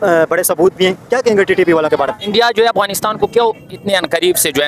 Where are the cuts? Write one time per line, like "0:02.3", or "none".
0:02.2